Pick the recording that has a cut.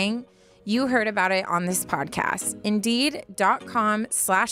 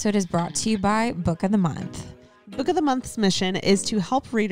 second; 1 cut; at 2.4 s

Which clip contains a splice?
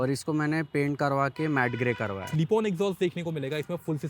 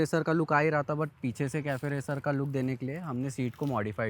first; 1 cut; at 2.2 s

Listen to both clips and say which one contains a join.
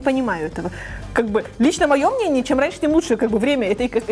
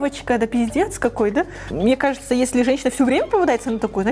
second; 1 cut; at 1.7 s

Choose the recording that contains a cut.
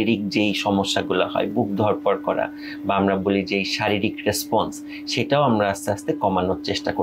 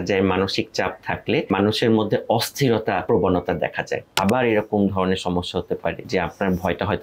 second; 4 cuts; at 1.5 s, 3.0 s, 4.1 s, 6.0 s

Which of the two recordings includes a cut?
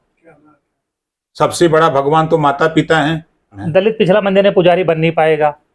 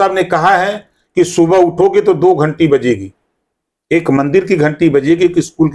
first; 1 cut; at 3.6 s

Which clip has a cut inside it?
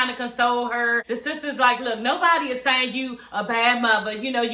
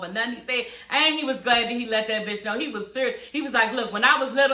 first; 1 cut; at 1.0 s

